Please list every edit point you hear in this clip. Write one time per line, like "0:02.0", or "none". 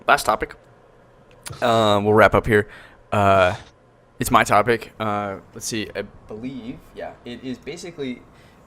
0:05.5